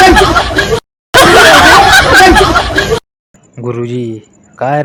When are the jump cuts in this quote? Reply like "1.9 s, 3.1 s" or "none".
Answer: none